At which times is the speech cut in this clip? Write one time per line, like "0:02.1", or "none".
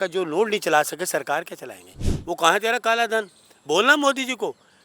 0:02.0